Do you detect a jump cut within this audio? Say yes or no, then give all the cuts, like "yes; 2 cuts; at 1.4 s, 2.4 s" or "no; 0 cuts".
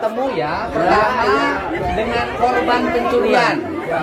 no; 0 cuts